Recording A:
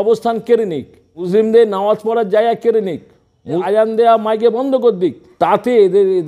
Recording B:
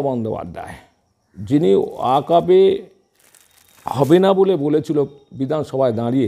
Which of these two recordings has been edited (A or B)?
A